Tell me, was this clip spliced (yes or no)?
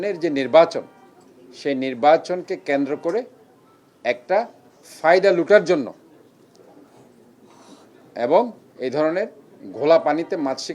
no